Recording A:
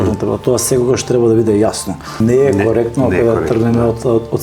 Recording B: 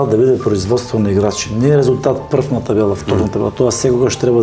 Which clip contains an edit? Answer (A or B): A